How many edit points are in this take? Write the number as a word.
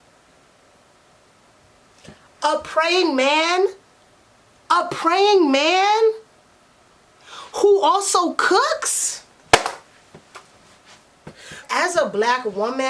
one